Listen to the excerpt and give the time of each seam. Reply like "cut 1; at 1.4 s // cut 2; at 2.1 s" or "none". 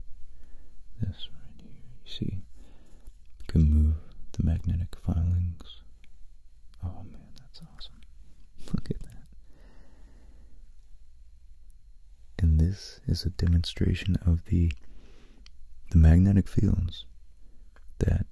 none